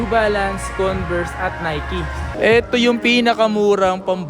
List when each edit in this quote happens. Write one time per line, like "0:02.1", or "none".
0:02.3